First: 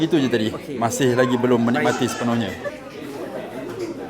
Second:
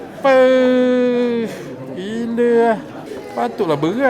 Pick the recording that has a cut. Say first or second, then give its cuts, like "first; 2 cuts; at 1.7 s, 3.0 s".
first; 1 cut; at 2.7 s